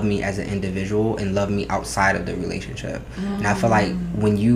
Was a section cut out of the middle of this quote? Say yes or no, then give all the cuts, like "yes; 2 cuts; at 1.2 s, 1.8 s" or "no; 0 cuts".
no; 0 cuts